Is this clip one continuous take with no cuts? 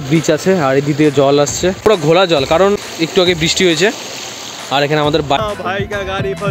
no; 2 cuts; at 1.8 s, 5.4 s

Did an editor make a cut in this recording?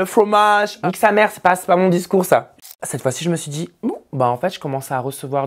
yes; 2 cuts; at 0.8 s, 2.5 s

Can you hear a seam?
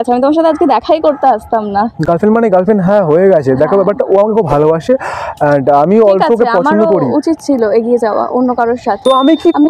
no; 0 cuts

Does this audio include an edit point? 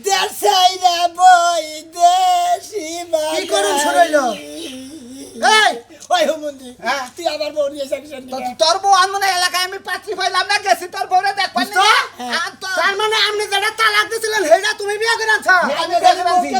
no; 0 cuts

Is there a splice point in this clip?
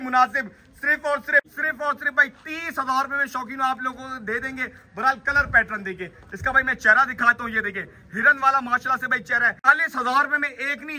yes; 2 cuts; at 1.5 s, 9.6 s

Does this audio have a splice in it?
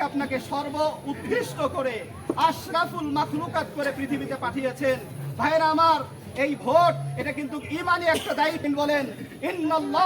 yes; 1 cut; at 8.7 s

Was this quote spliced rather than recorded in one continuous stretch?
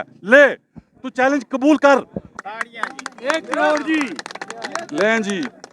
yes; 1 cut; at 2.2 s

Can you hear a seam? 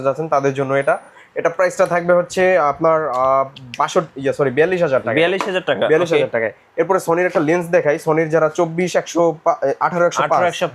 no; 0 cuts

